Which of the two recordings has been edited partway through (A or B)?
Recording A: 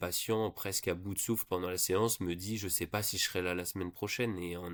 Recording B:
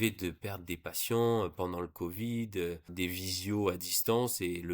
B